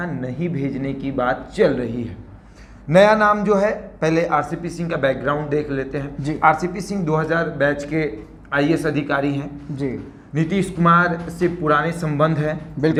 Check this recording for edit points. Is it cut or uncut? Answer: uncut